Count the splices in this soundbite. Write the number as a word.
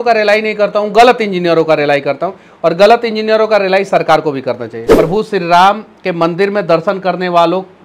one